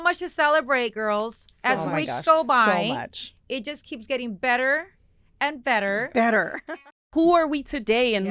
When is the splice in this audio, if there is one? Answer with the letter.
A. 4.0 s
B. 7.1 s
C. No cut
B